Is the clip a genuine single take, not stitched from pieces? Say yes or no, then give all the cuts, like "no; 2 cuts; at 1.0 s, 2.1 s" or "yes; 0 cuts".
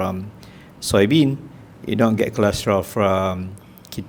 yes; 0 cuts